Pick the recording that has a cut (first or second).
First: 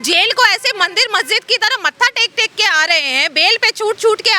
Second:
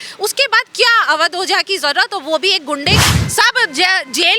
second